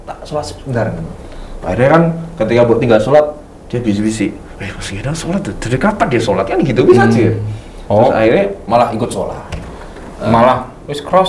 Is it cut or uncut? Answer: uncut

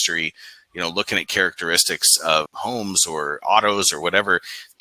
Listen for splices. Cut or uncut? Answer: cut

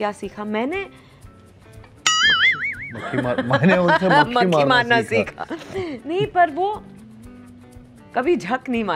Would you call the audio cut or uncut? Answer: uncut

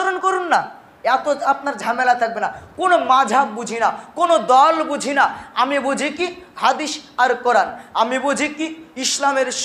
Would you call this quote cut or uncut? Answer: uncut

